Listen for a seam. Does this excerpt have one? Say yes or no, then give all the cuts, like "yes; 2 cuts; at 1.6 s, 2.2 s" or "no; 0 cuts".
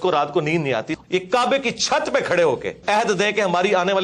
yes; 2 cuts; at 0.9 s, 2.7 s